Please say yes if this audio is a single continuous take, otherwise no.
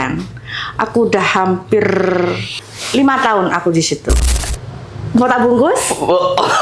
no